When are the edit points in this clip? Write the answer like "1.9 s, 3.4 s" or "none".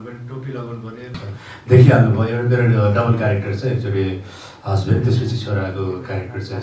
1.4 s